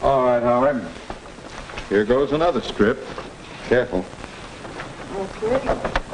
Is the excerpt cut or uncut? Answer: uncut